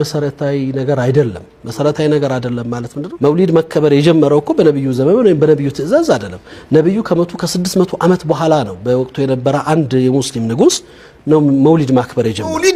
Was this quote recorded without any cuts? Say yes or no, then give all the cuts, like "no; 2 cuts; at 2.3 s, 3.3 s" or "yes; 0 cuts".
yes; 0 cuts